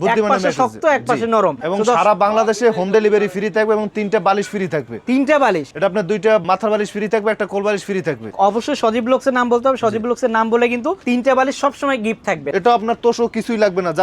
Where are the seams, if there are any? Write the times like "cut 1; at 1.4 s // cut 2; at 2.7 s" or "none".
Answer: cut 1; at 1.6 s // cut 2; at 8.3 s // cut 3; at 12.4 s

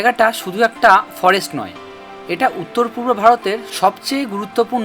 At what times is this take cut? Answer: none

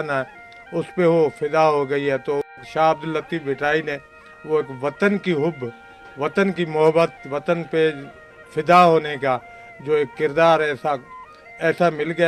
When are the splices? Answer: none

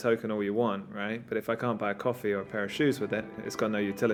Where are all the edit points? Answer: none

